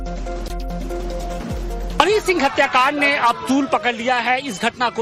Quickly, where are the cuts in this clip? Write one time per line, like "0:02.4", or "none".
0:02.9

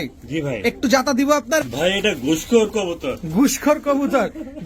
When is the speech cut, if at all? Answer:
0:01.6

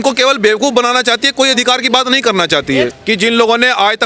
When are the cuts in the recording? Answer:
0:03.0

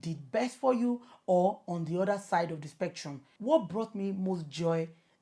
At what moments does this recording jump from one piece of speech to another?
0:03.3

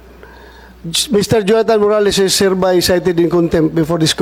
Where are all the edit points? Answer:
none

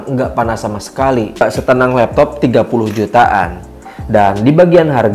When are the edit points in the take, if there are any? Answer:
0:01.4

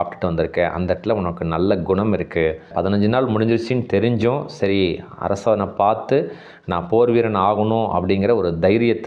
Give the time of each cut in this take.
0:02.7

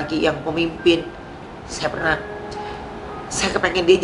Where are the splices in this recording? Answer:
none

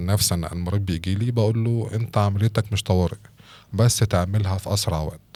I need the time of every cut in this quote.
none

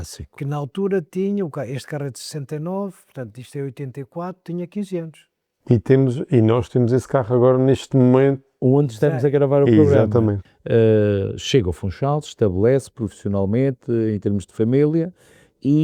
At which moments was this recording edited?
0:10.4

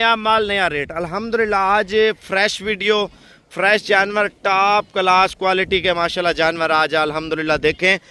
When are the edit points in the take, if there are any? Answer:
none

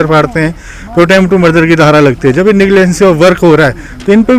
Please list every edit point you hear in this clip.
none

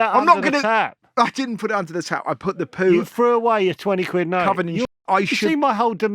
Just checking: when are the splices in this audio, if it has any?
0:04.8

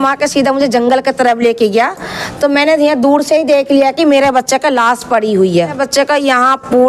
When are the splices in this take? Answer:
0:05.8

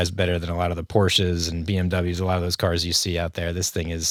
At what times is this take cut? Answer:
none

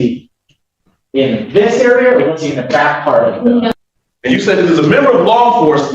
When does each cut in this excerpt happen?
0:03.7

